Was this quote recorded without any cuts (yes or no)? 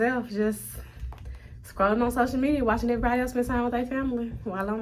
yes